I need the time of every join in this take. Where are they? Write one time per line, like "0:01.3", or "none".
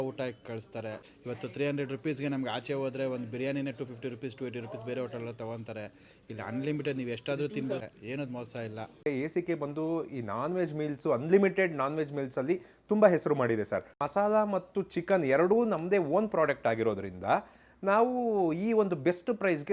0:01.1
0:07.8
0:09.1
0:14.0

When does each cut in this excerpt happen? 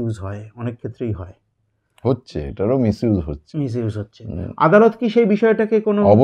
none

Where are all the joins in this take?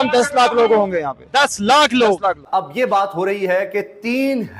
0:02.4

